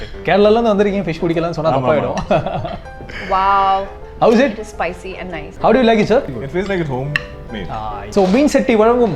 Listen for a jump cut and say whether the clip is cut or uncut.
cut